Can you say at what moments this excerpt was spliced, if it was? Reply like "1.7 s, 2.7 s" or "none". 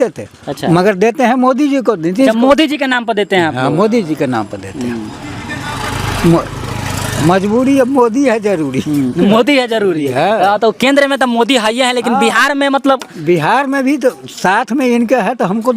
none